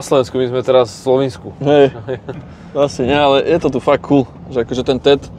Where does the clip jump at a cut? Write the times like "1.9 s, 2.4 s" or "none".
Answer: none